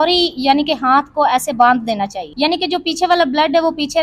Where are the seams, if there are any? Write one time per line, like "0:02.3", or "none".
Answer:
0:02.2

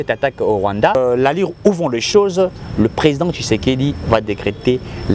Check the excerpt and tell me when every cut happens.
0:01.0

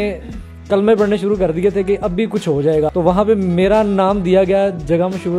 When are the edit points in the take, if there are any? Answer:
0:02.9

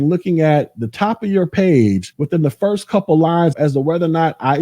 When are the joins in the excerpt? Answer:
0:03.5

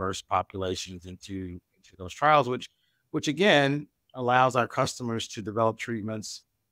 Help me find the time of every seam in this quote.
none

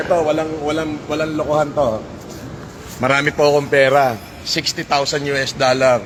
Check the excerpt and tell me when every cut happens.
none

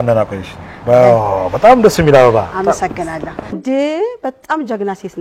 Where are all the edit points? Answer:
0:03.6

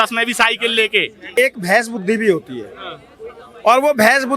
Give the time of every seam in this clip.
0:01.3

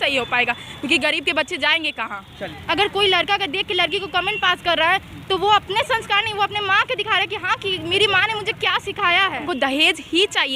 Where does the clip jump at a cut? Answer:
0:02.6
0:09.4

